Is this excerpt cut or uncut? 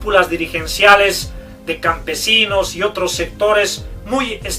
cut